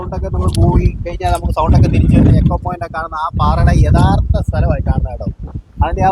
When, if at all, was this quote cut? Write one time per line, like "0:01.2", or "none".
none